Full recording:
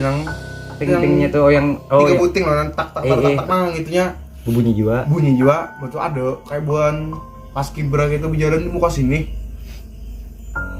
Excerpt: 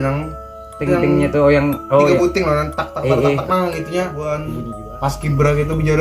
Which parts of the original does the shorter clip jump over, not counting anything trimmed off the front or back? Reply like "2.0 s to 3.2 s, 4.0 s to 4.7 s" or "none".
4.4 s to 7.0 s